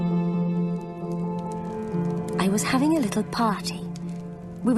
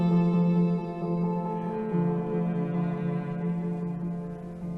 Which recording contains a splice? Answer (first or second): first